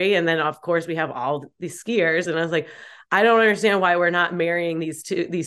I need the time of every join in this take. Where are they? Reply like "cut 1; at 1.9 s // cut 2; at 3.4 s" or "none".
none